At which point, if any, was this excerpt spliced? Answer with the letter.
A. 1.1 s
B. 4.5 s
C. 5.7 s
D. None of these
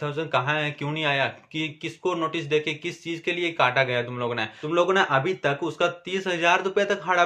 B